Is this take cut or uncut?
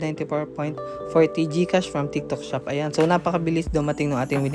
uncut